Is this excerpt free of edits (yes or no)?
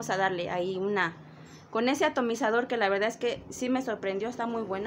yes